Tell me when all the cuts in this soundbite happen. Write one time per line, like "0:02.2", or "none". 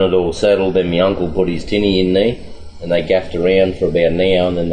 none